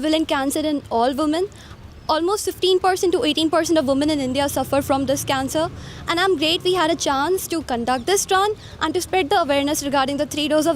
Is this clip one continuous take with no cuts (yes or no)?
yes